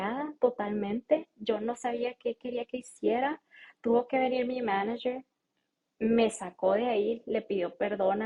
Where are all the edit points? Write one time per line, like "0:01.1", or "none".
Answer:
none